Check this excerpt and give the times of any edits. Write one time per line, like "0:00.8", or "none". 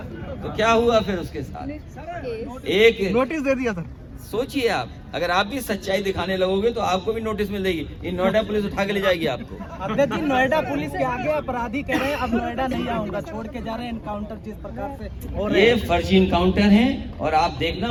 none